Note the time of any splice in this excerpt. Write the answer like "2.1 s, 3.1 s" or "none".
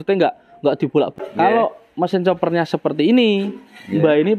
1.1 s